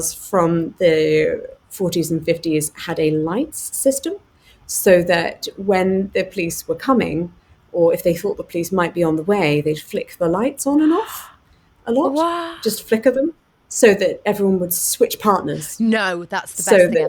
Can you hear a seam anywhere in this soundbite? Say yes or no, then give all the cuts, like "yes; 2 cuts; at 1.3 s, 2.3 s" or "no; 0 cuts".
no; 0 cuts